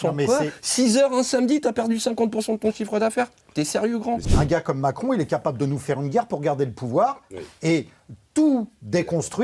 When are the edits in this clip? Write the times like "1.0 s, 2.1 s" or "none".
4.2 s